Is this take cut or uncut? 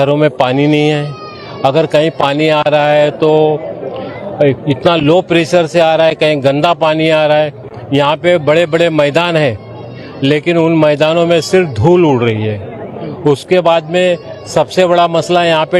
uncut